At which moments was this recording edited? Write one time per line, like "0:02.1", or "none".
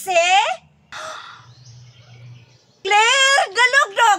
0:02.8